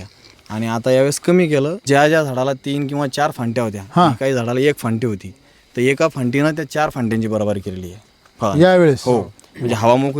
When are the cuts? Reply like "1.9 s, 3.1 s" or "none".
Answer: 1.8 s